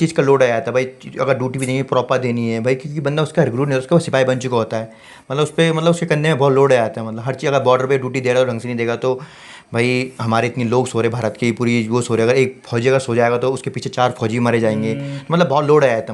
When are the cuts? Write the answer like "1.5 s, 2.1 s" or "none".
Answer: none